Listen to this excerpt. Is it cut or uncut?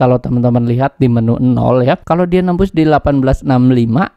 cut